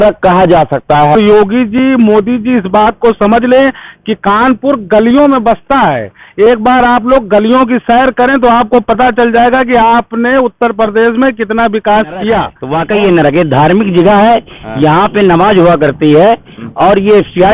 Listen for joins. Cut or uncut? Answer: cut